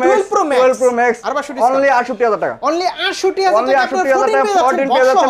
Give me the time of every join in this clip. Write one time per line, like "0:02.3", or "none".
0:01.2